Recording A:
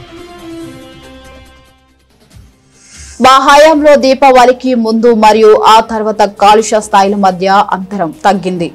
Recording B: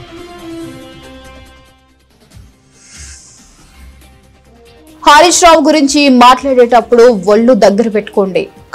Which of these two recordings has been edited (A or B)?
A